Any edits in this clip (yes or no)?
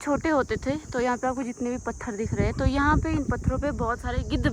no